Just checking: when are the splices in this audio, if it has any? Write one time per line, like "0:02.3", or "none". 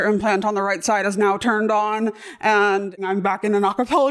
0:03.0